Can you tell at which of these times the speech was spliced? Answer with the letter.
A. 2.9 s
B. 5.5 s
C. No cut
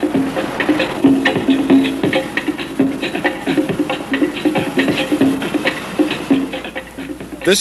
A